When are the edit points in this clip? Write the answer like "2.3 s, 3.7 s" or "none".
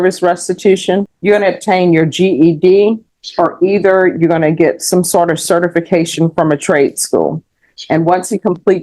1.1 s